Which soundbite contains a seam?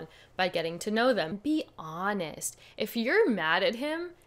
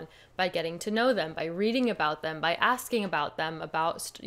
first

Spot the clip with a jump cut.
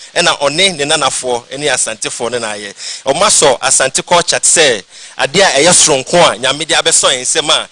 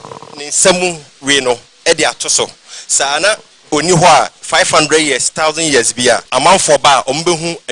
second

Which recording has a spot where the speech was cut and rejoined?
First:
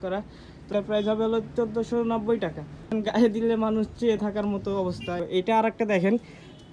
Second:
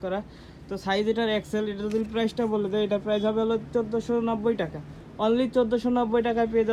first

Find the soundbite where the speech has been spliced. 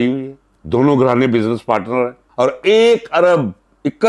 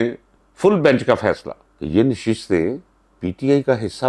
first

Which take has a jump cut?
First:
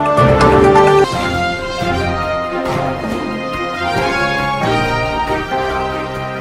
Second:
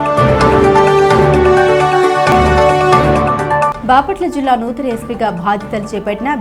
second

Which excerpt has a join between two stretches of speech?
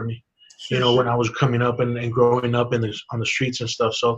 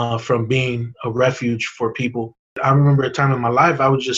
second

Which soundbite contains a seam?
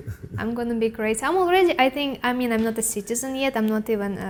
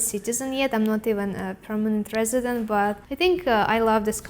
second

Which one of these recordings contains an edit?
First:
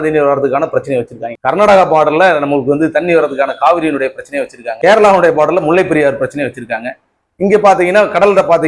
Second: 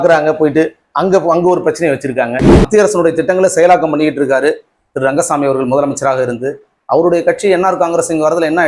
second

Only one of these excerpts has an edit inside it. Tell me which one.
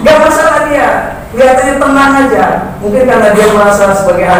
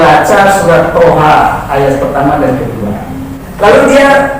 second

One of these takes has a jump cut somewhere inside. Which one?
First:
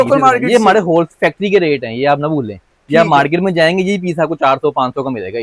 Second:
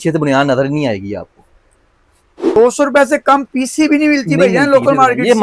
second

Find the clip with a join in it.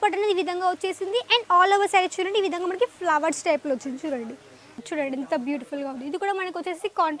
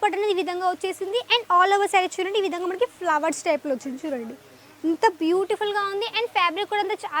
first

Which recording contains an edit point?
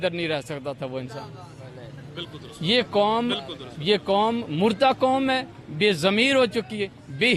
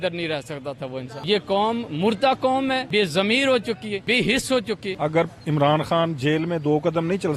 second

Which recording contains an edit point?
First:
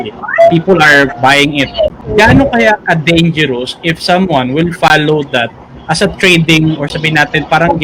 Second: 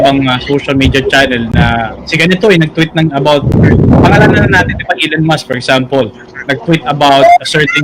first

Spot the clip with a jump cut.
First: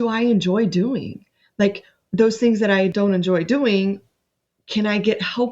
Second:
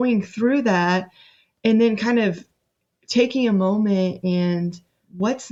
first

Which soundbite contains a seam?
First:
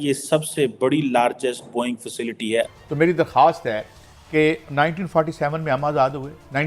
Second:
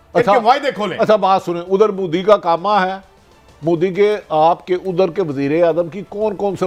first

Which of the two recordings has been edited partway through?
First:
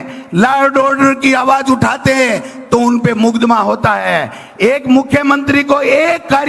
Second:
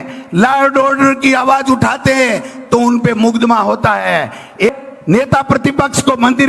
second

